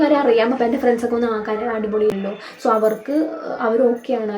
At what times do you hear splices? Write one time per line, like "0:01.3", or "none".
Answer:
0:02.1